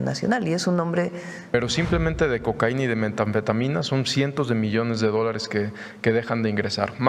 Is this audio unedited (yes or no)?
no